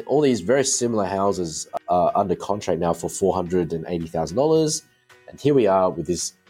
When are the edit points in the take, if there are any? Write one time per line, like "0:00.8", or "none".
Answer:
0:01.7